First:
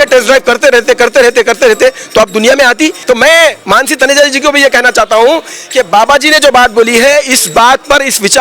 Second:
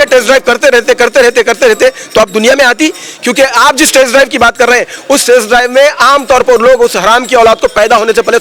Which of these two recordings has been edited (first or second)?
first